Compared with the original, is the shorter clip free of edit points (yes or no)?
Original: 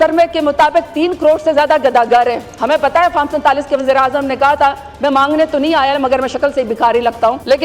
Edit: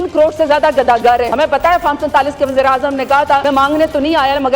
no